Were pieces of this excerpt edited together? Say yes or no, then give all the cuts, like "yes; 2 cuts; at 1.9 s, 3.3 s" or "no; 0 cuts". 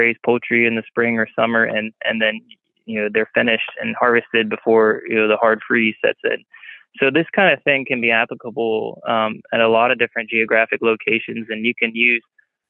no; 0 cuts